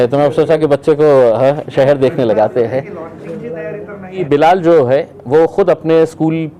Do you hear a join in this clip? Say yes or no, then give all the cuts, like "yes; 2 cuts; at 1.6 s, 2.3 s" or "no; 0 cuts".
yes; 1 cut; at 4.2 s